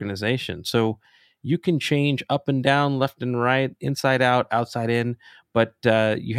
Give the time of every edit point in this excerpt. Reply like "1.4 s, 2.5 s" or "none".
none